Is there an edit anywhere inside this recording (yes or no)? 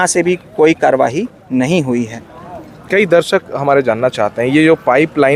no